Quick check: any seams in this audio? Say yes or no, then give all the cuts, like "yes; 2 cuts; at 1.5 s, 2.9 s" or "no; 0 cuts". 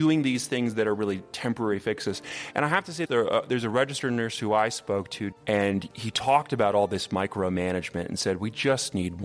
yes; 1 cut; at 5.2 s